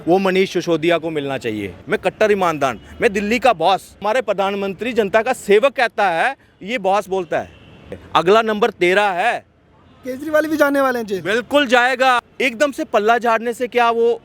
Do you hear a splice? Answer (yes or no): yes